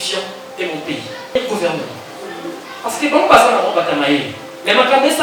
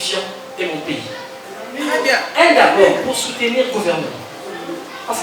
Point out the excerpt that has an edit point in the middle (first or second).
first